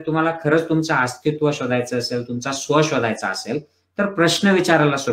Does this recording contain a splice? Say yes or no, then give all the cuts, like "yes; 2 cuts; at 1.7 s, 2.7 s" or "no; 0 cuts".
no; 0 cuts